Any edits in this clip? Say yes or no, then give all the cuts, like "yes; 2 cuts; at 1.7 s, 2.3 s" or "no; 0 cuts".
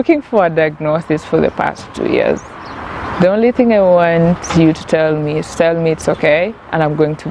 no; 0 cuts